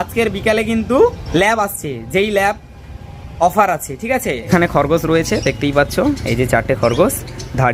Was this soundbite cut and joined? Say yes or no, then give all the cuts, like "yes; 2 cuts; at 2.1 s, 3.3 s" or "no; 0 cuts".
yes; 2 cuts; at 1.2 s, 4.5 s